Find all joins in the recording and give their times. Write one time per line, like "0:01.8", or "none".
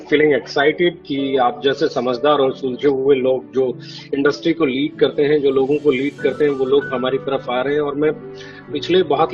none